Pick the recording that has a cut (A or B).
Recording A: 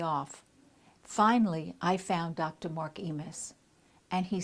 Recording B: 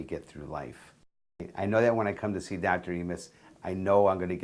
B